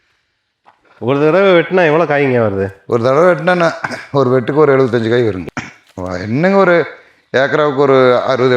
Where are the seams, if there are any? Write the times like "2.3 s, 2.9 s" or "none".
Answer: 5.4 s